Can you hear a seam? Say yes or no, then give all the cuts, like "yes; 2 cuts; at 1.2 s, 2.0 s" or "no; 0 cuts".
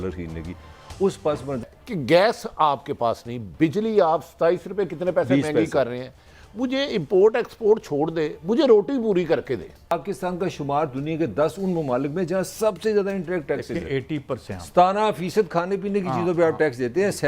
yes; 3 cuts; at 1.7 s, 9.9 s, 14.5 s